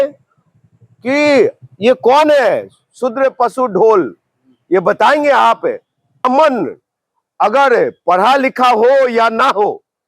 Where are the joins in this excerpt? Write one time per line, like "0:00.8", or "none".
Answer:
0:06.2